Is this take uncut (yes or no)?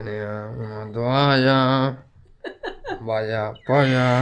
yes